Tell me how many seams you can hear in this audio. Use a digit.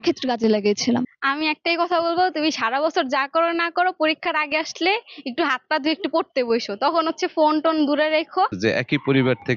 2